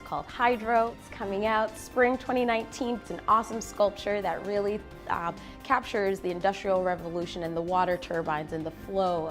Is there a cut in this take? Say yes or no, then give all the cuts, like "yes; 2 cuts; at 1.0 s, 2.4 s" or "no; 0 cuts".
yes; 1 cut; at 3.0 s